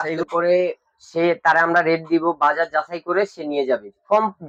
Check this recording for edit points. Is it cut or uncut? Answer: uncut